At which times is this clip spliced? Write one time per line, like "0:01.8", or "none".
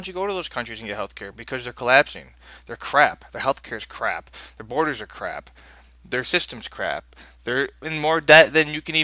0:05.8